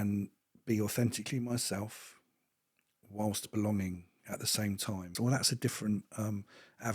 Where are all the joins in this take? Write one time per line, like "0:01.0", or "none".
0:05.1